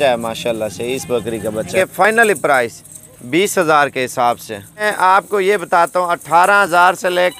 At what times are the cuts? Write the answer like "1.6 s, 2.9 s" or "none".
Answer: 2.0 s, 4.9 s